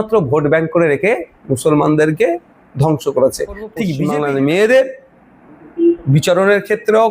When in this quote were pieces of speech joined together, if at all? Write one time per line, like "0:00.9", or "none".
0:03.8